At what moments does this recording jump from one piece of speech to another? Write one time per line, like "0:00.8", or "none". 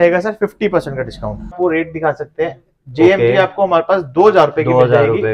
0:01.6